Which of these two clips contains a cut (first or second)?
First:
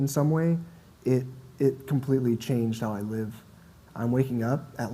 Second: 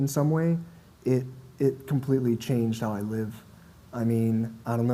first